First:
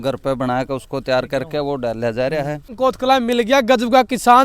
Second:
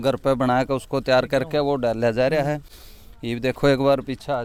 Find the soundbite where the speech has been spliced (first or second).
first